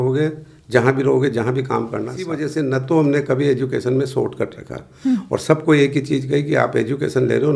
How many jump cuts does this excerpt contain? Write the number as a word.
one